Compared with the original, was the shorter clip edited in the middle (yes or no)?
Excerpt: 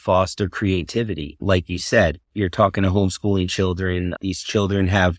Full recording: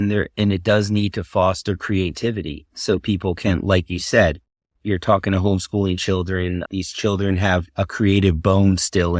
yes